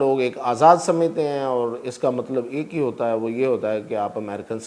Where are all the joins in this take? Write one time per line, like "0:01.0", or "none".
none